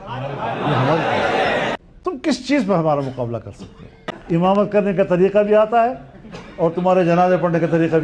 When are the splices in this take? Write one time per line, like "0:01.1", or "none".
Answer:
0:01.8
0:04.1